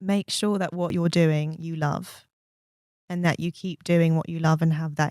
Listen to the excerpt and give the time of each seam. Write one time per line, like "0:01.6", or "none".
0:00.9